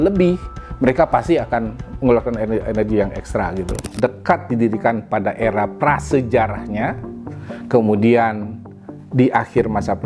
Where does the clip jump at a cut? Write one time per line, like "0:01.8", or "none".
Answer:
0:03.8